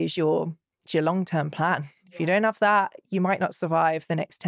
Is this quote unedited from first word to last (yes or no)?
yes